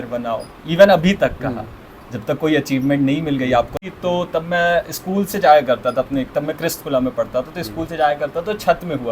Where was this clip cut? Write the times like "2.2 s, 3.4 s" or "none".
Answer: 3.7 s